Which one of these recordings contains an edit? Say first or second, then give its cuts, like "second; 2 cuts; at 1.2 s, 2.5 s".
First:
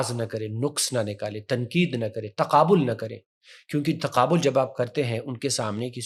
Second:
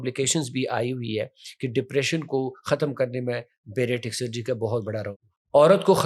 second; 1 cut; at 5.1 s